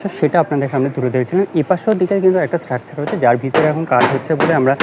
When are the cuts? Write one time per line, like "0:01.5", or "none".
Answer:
none